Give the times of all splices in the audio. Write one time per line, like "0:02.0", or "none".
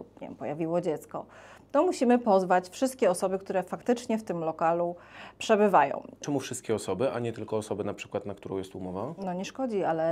0:06.2
0:09.2